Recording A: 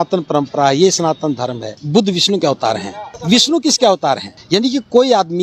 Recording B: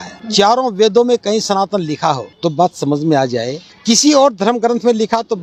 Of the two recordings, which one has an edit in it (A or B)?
A